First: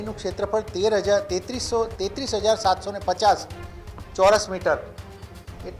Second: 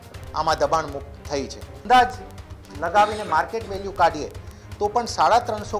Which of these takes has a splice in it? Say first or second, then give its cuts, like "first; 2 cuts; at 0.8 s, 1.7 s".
second; 1 cut; at 1.8 s